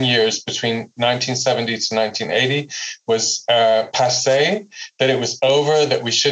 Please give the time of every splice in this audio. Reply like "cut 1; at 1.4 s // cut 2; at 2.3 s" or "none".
cut 1; at 0.9 s